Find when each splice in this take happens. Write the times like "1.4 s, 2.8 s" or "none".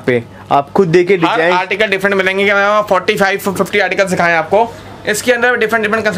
none